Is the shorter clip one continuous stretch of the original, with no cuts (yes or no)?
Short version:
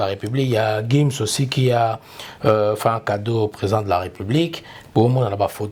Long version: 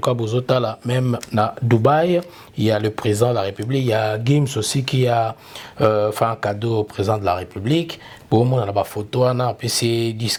yes